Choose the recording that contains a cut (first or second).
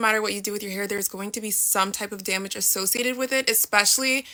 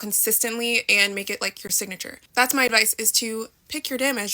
second